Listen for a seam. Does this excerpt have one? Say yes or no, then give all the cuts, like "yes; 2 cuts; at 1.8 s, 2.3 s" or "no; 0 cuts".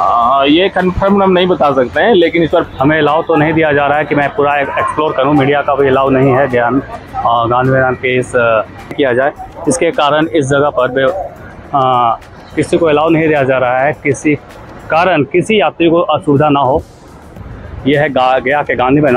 yes; 3 cuts; at 2.7 s, 9.0 s, 17.3 s